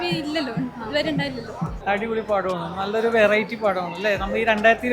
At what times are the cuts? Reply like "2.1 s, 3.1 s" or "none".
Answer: 1.8 s